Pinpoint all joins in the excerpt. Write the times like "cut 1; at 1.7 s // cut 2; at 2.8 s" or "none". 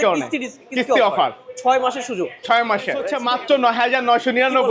cut 1; at 3.1 s

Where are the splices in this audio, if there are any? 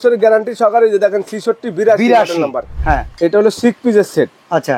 cut 1; at 2.7 s

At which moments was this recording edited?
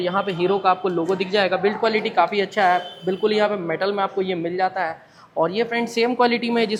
none

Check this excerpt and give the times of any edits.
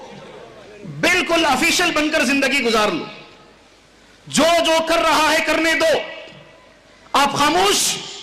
none

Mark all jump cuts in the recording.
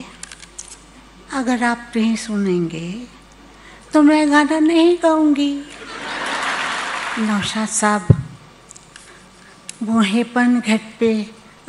cut 1; at 7.1 s

